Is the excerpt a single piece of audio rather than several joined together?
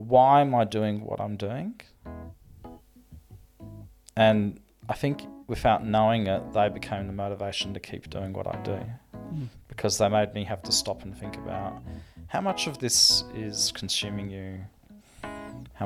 yes; 0 cuts

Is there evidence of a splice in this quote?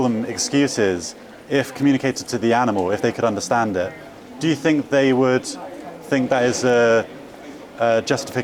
no; 0 cuts

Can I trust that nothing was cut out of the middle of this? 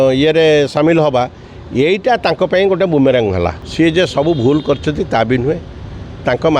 no; 1 cut; at 3.6 s

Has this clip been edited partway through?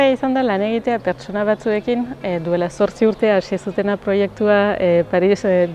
no; 0 cuts

